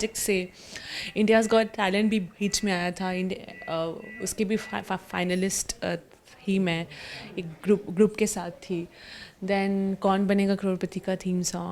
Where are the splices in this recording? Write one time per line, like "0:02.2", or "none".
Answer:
none